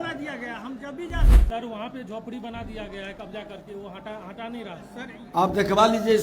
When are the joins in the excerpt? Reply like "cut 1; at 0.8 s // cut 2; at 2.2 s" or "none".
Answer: cut 1; at 1.3 s